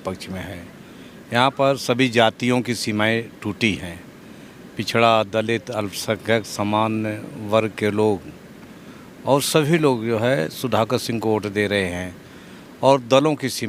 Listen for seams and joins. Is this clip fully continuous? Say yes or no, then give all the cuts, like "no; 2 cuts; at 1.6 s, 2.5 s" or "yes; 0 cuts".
yes; 0 cuts